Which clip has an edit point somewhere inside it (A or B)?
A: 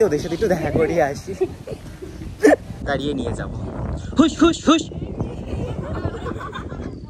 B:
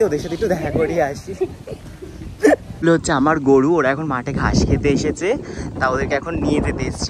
A